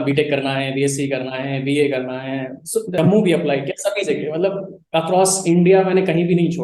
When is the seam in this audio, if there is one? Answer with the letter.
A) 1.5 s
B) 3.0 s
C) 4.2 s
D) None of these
B